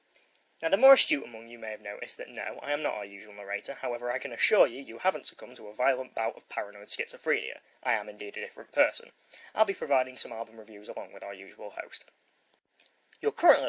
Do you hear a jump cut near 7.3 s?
yes; 1 cut; at 7.3 s

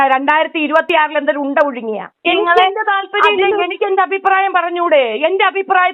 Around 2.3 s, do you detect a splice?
yes; 1 cut; at 2.3 s

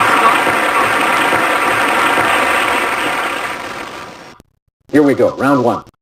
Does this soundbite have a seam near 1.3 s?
yes; 1 cut; at 1.3 s

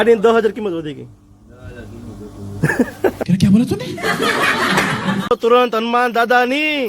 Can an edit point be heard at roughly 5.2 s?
yes; 1 cut; at 5.2 s

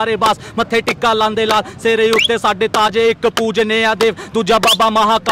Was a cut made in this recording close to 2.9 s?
no; 0 cuts

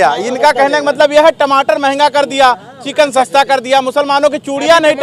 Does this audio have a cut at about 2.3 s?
no; 0 cuts

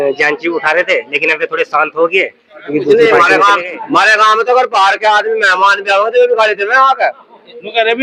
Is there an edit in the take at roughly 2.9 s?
yes; 1 cut; at 2.9 s

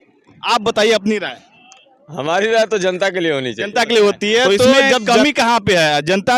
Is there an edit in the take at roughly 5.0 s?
yes; 1 cut; at 5.0 s

